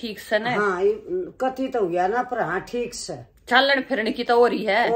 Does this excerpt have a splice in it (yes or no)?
no